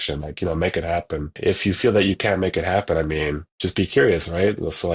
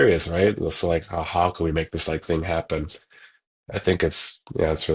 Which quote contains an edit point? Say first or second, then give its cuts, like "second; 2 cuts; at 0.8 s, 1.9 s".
first; 1 cut; at 1.4 s